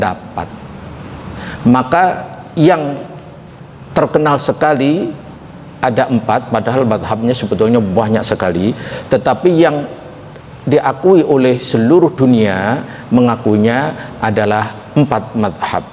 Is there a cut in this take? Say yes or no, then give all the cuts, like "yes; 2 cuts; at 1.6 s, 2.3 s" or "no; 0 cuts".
no; 0 cuts